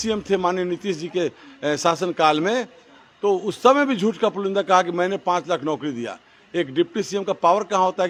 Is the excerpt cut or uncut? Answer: uncut